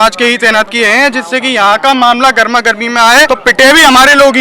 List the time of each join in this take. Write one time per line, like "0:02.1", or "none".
0:03.3

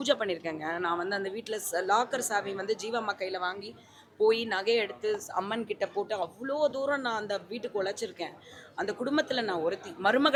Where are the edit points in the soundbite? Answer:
none

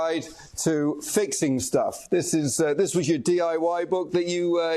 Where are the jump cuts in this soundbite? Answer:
none

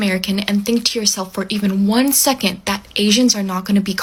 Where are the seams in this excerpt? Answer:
none

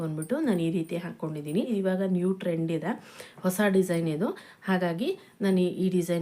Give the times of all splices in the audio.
0:01.7

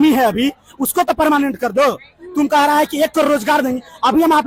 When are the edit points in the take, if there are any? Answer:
none

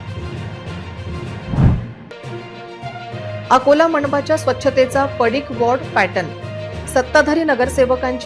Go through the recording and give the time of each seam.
0:01.9

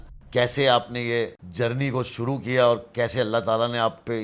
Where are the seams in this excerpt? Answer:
none

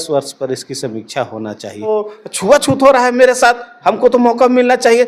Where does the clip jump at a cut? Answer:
0:01.9

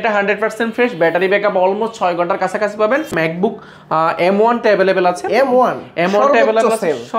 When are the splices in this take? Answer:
0:03.1

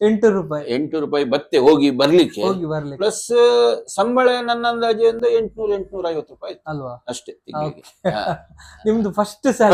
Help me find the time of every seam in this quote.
none

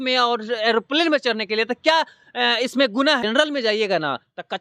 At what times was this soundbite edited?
0:03.2

